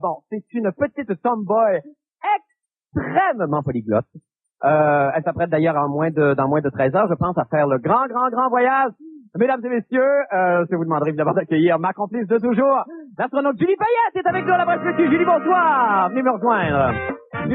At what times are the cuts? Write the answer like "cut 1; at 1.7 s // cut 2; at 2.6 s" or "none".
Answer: cut 1; at 14.7 s